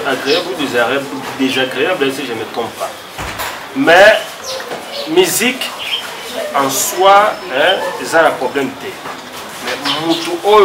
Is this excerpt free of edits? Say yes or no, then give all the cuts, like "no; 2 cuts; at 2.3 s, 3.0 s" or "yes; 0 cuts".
yes; 0 cuts